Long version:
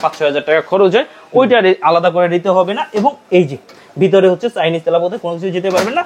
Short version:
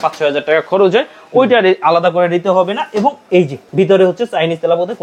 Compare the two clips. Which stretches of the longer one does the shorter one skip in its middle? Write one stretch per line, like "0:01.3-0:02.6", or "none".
0:03.6-0:03.8